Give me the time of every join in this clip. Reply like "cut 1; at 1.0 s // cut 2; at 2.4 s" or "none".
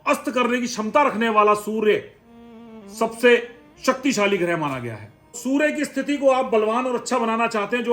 cut 1; at 5.4 s